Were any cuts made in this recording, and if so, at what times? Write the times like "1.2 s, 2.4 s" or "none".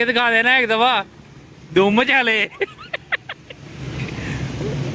none